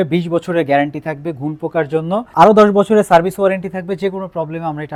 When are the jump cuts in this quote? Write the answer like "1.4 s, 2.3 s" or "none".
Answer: none